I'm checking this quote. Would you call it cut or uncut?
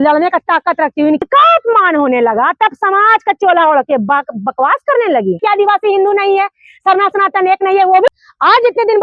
cut